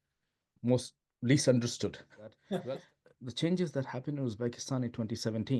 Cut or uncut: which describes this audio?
cut